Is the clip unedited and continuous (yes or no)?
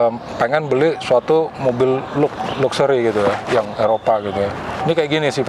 yes